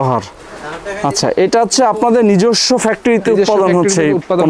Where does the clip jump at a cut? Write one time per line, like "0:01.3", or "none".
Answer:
none